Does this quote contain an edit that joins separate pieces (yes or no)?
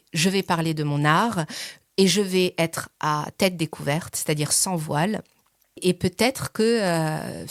no